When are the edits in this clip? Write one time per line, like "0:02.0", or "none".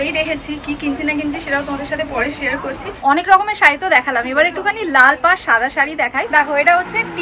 0:02.8
0:06.3